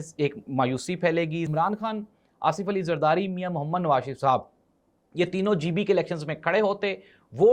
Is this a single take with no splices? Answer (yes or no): no